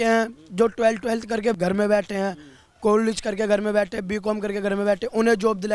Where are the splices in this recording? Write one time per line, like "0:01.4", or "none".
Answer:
0:01.5